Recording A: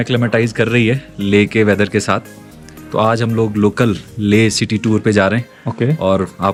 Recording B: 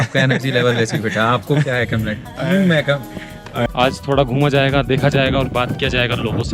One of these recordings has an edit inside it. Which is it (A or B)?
B